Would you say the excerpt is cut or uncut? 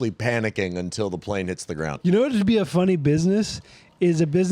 cut